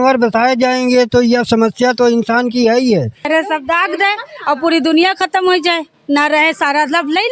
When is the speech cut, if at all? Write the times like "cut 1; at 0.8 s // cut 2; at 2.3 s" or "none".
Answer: cut 1; at 3.3 s